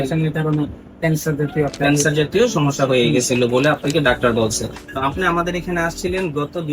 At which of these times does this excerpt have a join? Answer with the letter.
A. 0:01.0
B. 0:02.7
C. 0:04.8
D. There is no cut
C